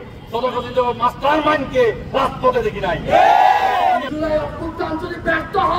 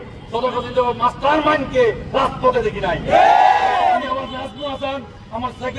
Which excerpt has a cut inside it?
first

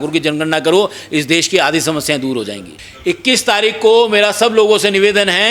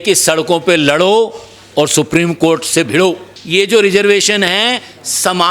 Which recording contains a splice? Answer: second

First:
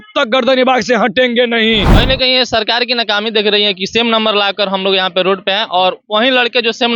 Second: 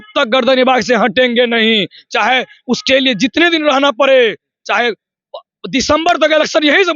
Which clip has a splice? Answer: first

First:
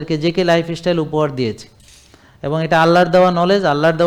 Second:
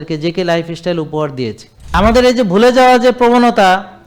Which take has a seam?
second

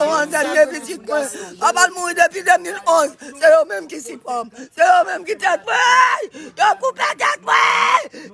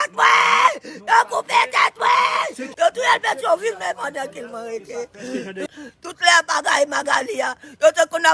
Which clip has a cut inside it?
second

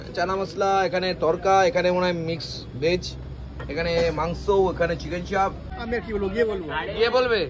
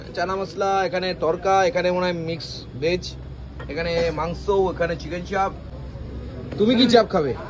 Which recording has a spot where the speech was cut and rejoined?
first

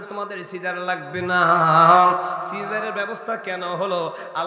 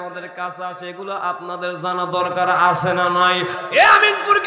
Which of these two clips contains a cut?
second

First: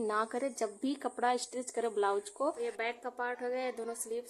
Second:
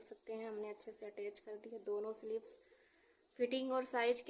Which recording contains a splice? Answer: first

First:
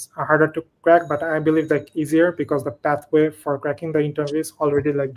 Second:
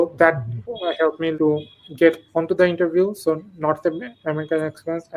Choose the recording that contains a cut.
second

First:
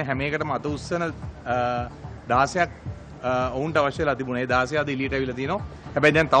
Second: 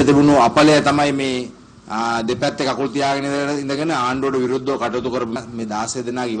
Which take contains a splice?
second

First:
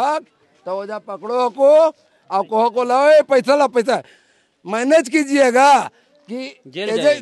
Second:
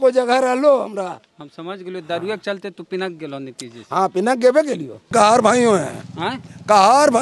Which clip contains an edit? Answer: second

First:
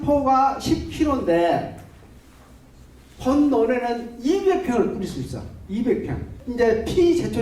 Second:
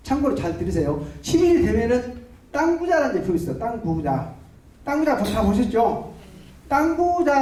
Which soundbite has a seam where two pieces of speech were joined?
first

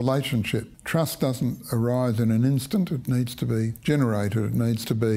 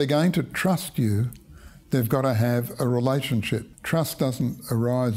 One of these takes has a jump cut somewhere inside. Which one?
first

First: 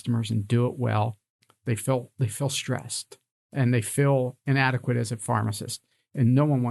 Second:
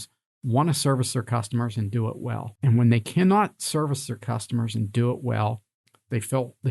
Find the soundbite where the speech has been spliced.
second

